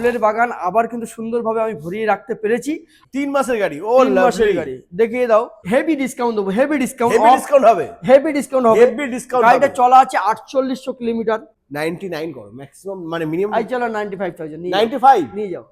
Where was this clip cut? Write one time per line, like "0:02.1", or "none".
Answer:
0:02.9
0:05.6
0:11.6